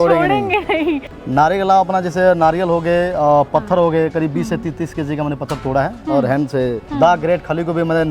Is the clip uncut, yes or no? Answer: no